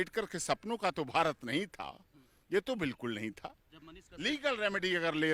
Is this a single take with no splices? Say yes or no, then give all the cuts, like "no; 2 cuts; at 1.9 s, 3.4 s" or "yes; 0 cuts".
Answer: yes; 0 cuts